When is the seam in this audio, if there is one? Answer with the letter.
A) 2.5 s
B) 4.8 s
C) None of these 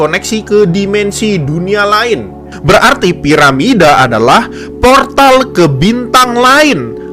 A